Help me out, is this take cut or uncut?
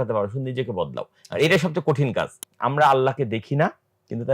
cut